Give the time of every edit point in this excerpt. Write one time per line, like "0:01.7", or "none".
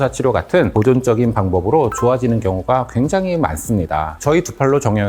none